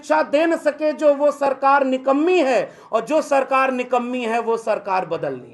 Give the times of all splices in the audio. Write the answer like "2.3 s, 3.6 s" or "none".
none